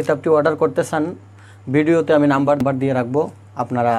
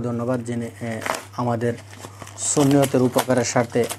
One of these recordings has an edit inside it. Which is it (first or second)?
first